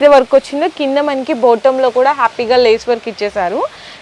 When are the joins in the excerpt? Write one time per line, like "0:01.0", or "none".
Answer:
none